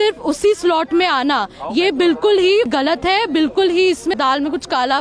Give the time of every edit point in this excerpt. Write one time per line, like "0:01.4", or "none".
0:02.7
0:04.1